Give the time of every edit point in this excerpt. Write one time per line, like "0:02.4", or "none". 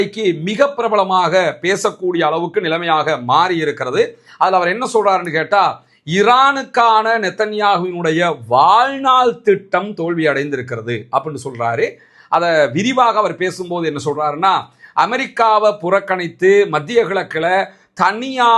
none

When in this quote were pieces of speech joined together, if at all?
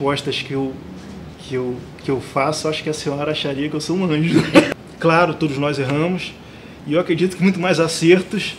0:04.7

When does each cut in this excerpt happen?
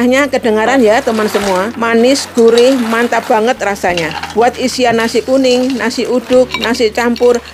0:01.7
0:04.2

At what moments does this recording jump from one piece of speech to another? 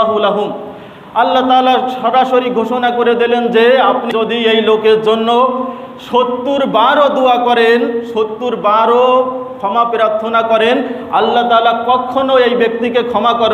0:04.1

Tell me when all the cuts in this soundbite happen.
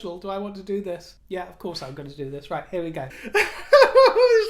0:01.1
0:03.2

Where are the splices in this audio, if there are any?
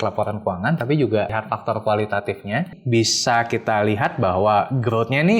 0:01.4
0:02.7

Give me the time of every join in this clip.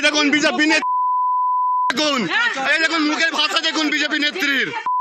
none

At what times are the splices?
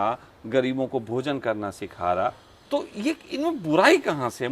0:02.5

